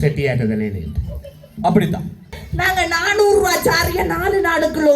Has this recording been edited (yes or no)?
yes